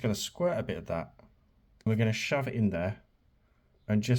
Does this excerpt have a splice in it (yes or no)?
yes